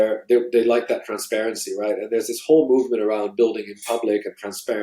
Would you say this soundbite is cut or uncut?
uncut